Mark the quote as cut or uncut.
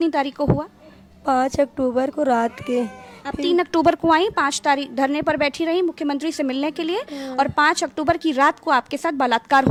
uncut